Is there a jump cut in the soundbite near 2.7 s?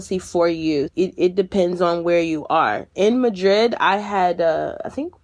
no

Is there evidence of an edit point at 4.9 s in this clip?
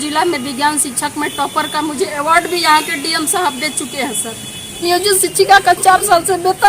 yes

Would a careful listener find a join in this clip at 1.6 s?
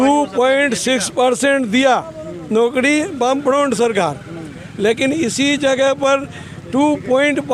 no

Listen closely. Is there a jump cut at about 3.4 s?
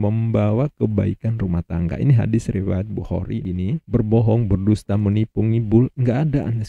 yes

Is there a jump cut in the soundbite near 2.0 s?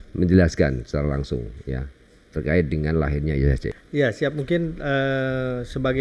no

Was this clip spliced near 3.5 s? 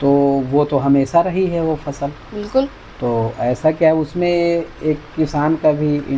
no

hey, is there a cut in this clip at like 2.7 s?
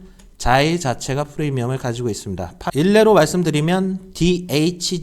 yes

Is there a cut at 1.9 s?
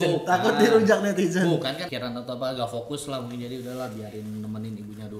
yes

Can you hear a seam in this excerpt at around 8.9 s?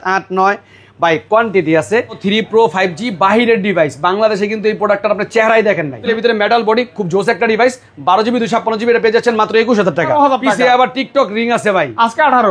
no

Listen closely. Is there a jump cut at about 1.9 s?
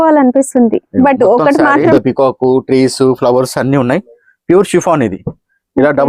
yes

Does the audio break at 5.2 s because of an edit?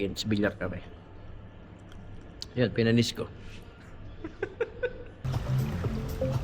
yes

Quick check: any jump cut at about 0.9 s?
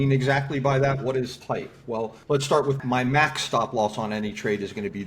no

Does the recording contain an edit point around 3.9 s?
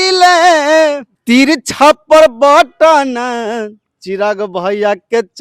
no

